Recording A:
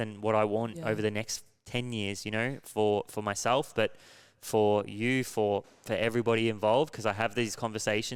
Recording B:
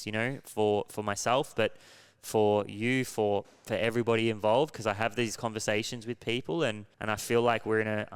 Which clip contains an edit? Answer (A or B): B